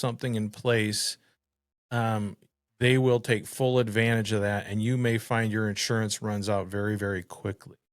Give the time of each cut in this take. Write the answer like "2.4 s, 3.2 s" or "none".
none

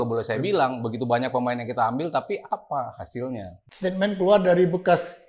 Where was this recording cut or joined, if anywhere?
3.6 s

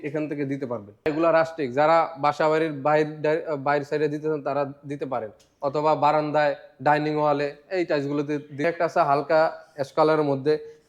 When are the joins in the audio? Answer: 1.1 s, 8.6 s

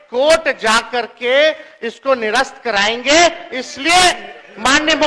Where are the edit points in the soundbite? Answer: none

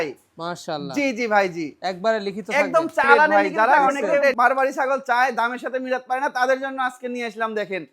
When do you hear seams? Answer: 3.3 s

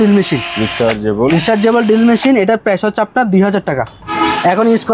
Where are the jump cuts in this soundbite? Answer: 4.0 s

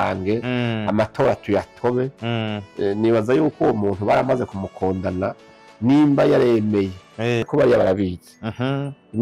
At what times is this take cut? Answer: 7.4 s

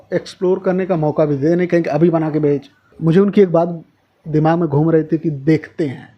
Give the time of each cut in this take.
2.8 s

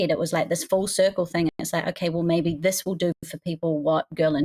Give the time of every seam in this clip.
none

